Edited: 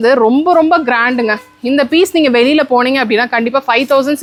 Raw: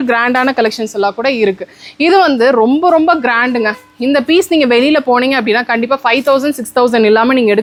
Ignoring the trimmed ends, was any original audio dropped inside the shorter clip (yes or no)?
no